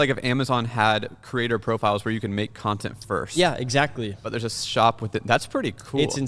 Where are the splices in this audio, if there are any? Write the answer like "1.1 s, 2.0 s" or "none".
none